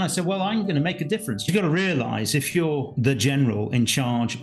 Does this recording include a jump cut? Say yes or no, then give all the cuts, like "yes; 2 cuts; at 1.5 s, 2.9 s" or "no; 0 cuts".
yes; 2 cuts; at 1.5 s, 2.9 s